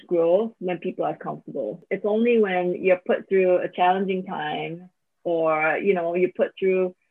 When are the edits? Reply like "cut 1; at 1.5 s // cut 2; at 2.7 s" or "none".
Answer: cut 1; at 1.9 s